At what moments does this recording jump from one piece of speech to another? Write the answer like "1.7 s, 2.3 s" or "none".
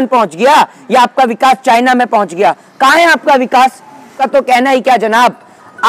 4.2 s